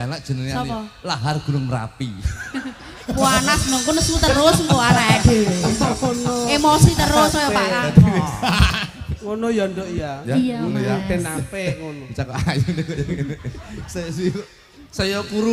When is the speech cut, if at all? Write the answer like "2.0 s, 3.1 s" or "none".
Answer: none